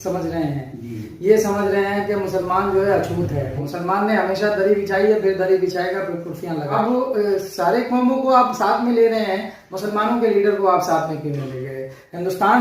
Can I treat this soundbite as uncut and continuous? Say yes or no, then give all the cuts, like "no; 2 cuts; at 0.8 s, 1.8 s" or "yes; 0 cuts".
no; 2 cuts; at 3.6 s, 6.7 s